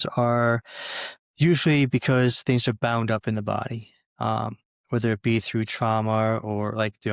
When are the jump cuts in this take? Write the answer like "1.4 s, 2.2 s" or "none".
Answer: none